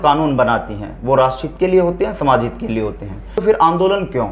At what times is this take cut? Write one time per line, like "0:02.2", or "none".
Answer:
0:03.4